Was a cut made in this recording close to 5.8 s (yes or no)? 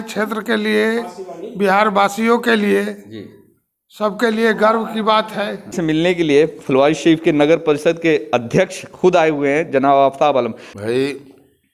yes